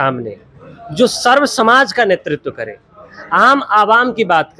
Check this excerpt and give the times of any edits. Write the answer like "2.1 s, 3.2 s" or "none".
none